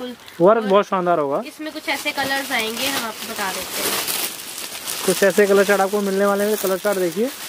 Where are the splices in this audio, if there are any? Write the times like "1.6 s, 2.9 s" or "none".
none